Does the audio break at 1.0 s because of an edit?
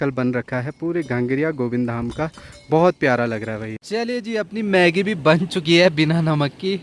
no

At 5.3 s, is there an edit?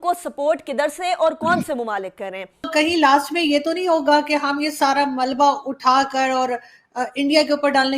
no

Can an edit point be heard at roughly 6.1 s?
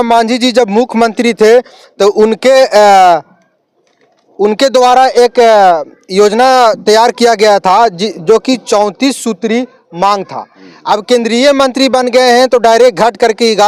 no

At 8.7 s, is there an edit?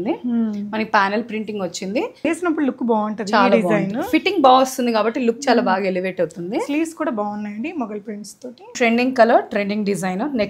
yes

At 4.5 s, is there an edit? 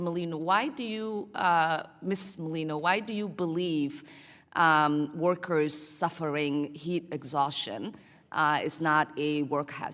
no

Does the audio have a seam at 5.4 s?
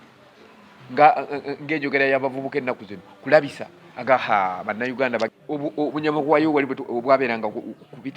yes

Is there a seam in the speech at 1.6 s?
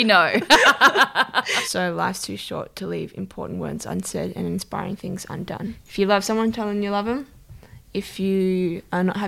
yes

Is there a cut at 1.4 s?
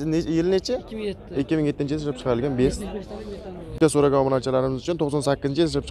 no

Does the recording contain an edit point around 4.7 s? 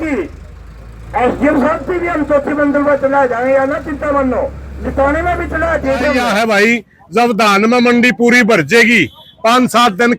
no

